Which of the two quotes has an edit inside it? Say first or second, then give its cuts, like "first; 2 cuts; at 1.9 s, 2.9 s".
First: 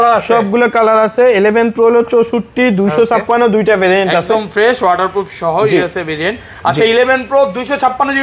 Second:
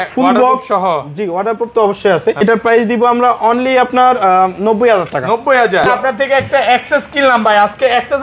second; 2 cuts; at 2.4 s, 5.8 s